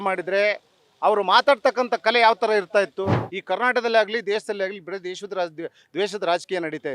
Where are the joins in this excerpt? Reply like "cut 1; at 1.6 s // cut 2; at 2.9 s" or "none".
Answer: cut 1; at 3.3 s